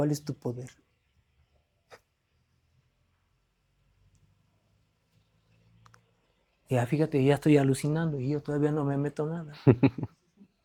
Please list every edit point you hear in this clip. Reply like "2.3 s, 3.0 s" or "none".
none